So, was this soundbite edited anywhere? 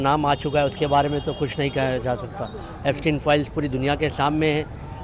no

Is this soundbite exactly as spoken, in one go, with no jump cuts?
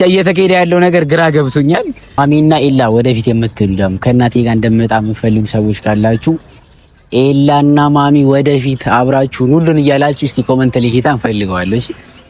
no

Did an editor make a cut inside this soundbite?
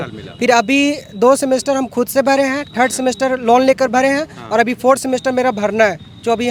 no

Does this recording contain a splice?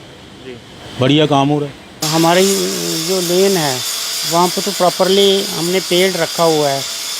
yes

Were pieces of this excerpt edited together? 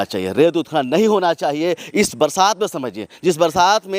no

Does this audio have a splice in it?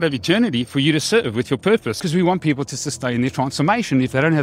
yes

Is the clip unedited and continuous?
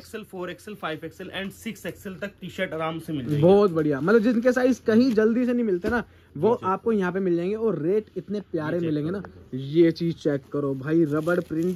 yes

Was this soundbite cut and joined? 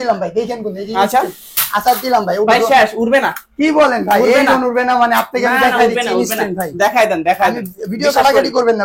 no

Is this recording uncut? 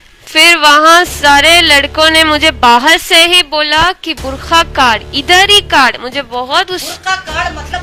yes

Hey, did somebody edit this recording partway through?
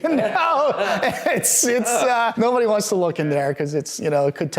yes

